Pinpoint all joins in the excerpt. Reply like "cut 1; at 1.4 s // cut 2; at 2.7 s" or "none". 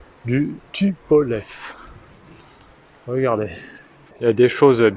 cut 1; at 4.0 s